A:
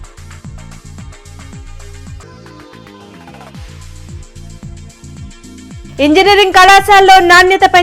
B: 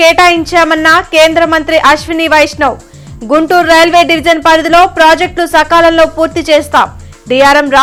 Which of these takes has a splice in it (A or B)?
A